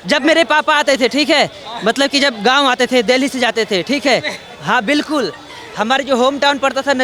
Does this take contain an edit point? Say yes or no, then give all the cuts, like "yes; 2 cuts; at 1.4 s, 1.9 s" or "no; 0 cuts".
no; 0 cuts